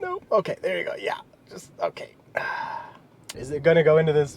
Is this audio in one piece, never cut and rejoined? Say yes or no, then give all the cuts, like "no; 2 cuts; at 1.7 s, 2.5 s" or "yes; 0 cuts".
no; 1 cut; at 3.4 s